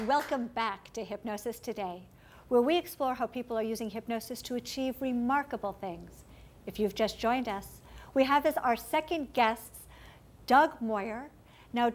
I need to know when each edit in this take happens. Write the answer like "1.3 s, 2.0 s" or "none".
2.7 s